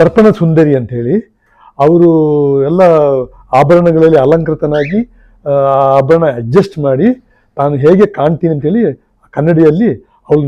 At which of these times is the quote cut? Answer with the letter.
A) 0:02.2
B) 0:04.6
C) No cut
C